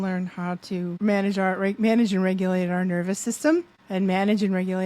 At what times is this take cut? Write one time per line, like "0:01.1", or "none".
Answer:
0:01.0
0:03.8